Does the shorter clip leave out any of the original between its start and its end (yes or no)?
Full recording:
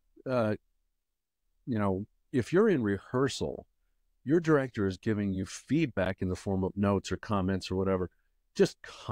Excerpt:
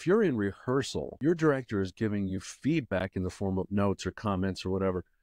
yes